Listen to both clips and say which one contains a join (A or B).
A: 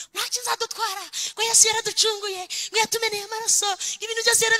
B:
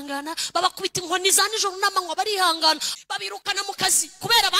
B